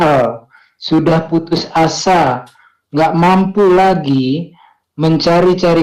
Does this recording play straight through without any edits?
yes; 0 cuts

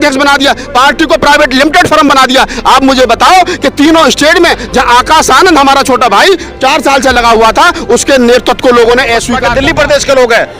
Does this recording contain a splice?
yes; 1 cut; at 9.4 s

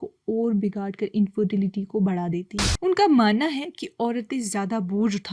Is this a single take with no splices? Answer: no; 1 cut; at 2.7 s

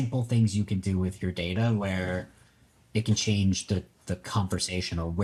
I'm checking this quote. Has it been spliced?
no; 0 cuts

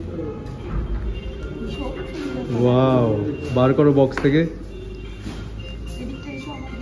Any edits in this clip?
no; 0 cuts

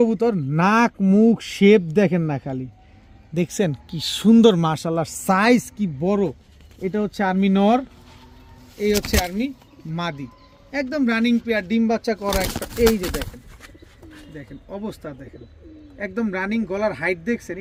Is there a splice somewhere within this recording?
no; 0 cuts

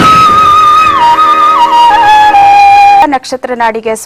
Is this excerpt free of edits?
no; 1 cut; at 3.0 s

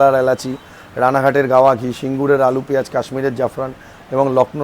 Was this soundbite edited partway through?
no; 0 cuts

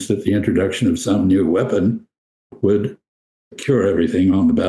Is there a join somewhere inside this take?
yes; 1 cut; at 2.5 s

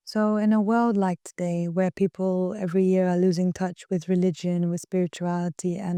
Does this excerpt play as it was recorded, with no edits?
yes; 0 cuts

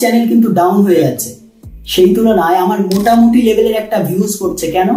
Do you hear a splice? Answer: no; 0 cuts

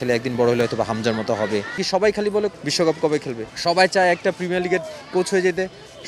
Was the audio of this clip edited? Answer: yes; 3 cuts; at 1.8 s, 2.5 s, 3.5 s

